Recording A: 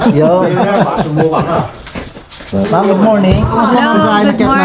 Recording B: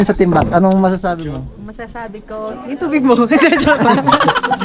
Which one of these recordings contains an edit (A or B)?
A